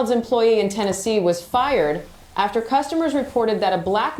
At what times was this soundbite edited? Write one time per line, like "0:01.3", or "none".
none